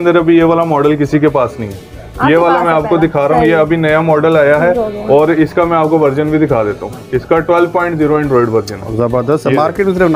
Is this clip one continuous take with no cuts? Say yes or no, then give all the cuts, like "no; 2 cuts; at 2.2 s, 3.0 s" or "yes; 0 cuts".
yes; 0 cuts